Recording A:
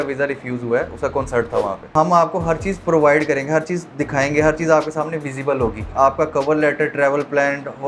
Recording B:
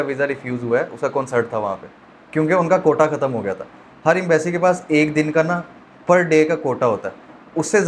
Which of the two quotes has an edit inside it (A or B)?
A